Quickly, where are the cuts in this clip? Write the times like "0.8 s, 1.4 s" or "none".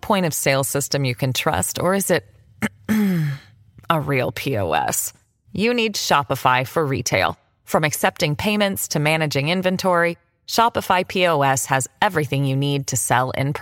none